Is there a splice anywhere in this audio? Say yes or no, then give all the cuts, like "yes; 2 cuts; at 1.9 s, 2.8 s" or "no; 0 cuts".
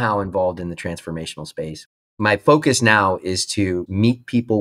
yes; 2 cuts; at 2.1 s, 3.8 s